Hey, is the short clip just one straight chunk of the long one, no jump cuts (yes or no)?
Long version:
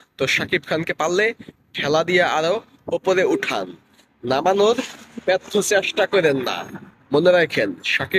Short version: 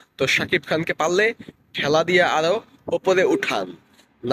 yes